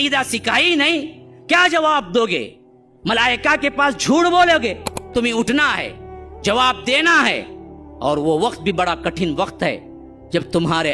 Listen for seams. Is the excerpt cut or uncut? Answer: cut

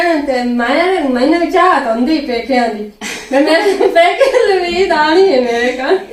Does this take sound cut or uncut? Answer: uncut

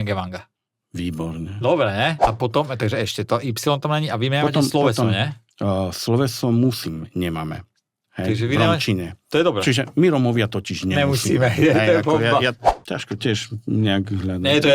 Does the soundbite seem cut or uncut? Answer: cut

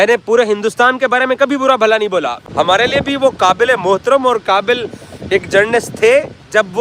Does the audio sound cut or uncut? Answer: cut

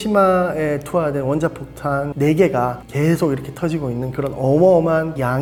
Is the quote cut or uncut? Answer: uncut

